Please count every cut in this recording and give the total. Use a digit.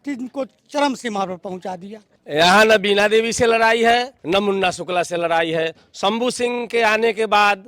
2